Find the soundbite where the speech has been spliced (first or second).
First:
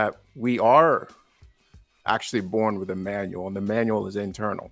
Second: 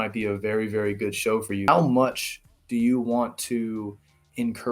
second